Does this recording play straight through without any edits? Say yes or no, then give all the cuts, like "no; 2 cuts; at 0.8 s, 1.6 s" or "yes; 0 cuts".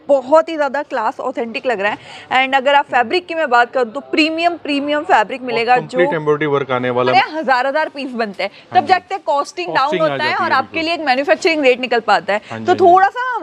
no; 1 cut; at 7.1 s